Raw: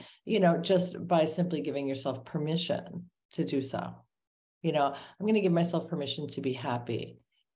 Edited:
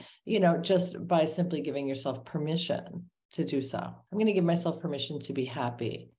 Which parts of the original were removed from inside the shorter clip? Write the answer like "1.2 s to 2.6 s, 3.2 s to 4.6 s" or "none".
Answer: 4.0 s to 5.1 s